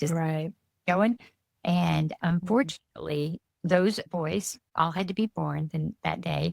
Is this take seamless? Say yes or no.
no